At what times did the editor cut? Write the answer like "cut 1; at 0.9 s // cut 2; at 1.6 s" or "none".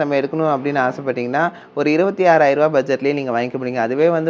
none